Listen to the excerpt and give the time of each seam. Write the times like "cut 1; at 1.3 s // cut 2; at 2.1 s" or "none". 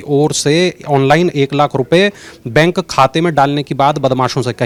none